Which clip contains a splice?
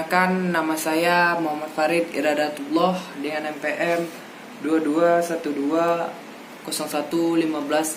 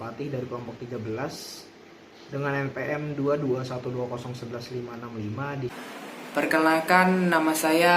second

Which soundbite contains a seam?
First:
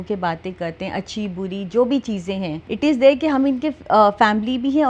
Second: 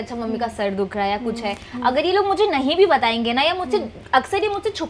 first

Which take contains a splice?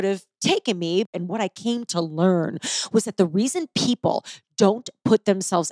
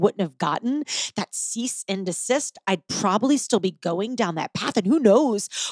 first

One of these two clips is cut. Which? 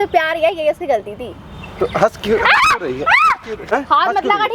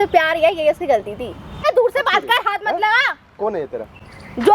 second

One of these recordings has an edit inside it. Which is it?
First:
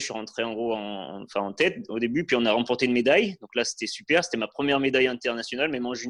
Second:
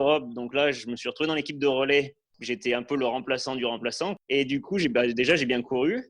second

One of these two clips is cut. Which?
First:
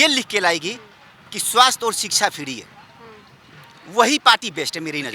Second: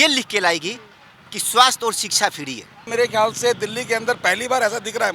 second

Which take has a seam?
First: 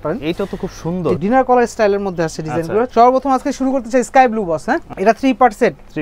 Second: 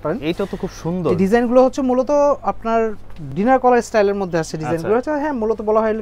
first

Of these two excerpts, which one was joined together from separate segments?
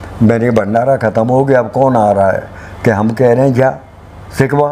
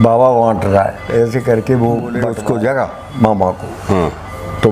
second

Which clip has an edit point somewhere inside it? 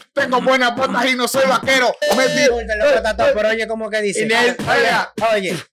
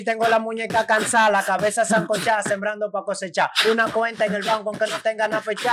first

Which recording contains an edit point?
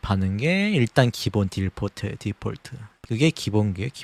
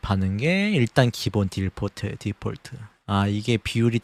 first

